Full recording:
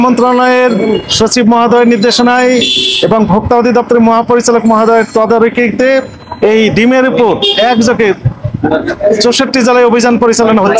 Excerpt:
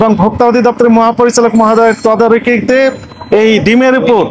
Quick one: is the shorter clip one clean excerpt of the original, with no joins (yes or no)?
yes